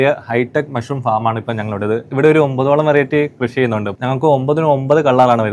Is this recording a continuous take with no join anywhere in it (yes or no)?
no